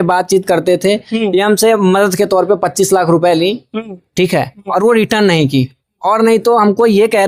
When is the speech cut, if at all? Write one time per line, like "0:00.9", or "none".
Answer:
none